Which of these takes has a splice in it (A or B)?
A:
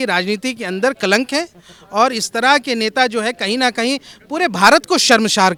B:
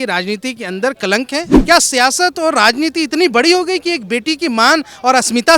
B